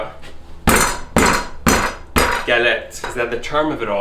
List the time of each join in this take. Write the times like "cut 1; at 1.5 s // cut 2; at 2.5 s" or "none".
cut 1; at 3.1 s